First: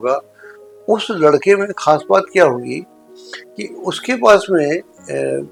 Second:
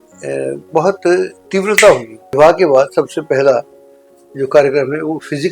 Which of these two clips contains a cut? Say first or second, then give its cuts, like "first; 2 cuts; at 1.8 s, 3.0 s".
second; 1 cut; at 2.2 s